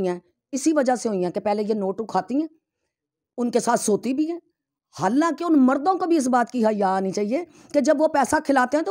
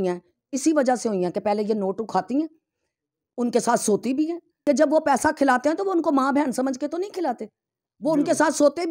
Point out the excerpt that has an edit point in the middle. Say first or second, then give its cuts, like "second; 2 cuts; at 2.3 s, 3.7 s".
second; 1 cut; at 4.5 s